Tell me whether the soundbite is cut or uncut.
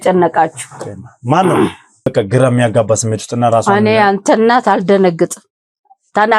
cut